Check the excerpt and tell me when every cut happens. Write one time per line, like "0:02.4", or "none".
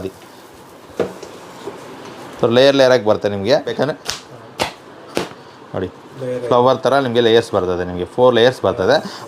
0:03.8